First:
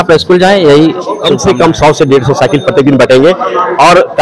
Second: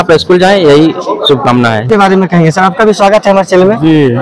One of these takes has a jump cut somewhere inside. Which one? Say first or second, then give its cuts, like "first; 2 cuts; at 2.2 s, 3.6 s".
first; 1 cut; at 1.3 s